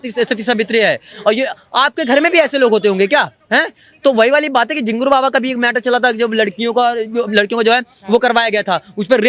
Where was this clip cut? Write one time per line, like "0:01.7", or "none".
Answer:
none